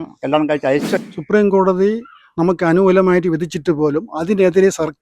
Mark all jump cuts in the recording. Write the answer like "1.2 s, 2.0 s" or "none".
1.0 s